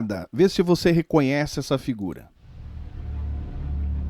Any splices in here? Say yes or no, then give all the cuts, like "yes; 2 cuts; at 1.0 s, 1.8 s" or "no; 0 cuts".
yes; 1 cut; at 2.5 s